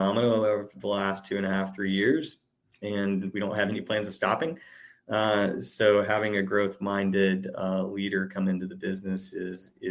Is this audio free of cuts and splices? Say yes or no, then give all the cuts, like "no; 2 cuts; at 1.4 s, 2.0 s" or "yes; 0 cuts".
yes; 0 cuts